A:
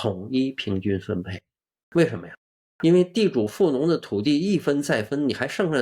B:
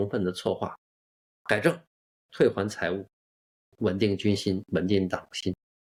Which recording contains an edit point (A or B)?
A